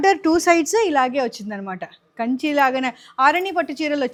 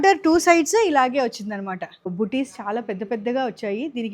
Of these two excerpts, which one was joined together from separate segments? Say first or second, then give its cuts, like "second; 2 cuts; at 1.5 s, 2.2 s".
second; 1 cut; at 2.1 s